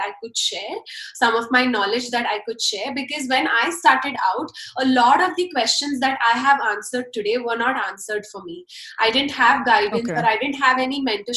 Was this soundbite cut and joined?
no; 0 cuts

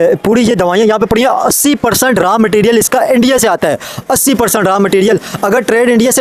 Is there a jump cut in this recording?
no; 0 cuts

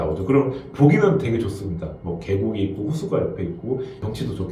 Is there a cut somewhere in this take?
no; 0 cuts

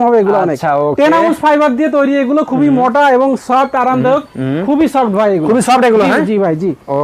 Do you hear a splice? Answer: no; 0 cuts

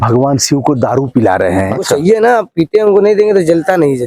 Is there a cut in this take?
yes; 1 cut; at 1.7 s

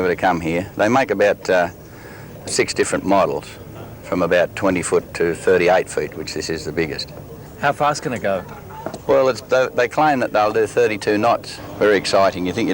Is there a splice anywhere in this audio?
yes; 2 cuts; at 7.5 s, 11.6 s

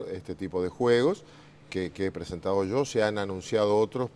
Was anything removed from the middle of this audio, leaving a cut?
yes; 1 cut; at 3.1 s

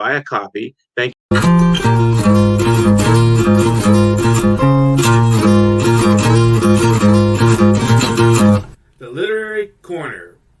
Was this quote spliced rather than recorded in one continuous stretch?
yes; 1 cut; at 1.1 s

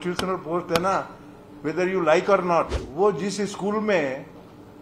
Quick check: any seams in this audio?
yes; 1 cut; at 2.8 s

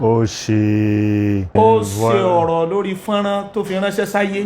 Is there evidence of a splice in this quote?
yes; 1 cut; at 1.5 s

